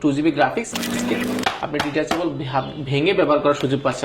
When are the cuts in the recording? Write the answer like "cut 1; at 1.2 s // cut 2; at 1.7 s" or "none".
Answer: cut 1; at 1.0 s